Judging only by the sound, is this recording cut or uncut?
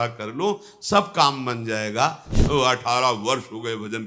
cut